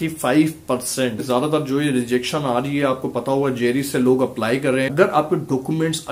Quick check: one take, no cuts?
no; 2 cuts; at 1.2 s, 4.9 s

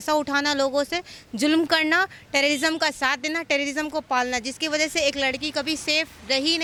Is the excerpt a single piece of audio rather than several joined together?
yes; 0 cuts

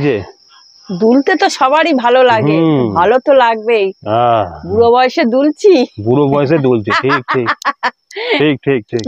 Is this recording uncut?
yes; 0 cuts

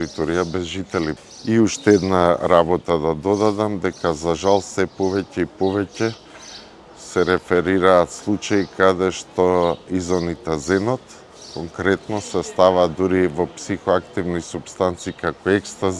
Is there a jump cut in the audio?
yes; 1 cut; at 1.2 s

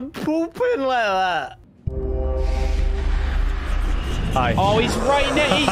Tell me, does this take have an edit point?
yes; 1 cut; at 1.7 s

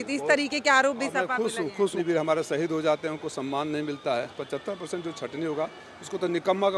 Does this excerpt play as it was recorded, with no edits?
no; 2 cuts; at 2.0 s, 4.4 s

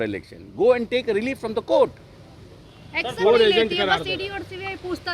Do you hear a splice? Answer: no; 0 cuts

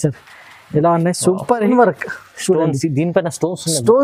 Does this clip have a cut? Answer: yes; 1 cut; at 1.7 s

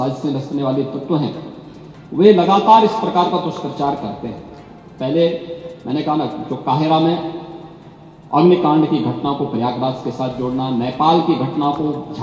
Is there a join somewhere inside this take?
no; 0 cuts

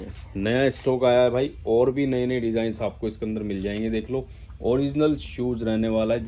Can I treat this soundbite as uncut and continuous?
yes; 0 cuts

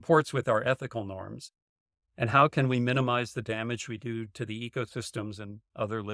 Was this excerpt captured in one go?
yes; 0 cuts

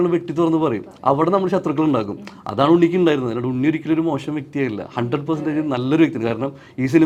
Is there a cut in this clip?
no; 0 cuts

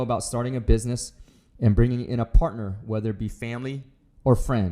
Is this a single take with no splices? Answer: yes; 0 cuts

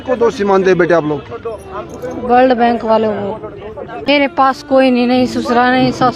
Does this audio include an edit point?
yes; 1 cut; at 4.3 s

